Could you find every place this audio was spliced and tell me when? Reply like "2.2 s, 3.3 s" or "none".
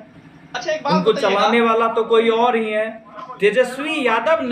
3.1 s